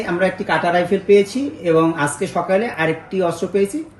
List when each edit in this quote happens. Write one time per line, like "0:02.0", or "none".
none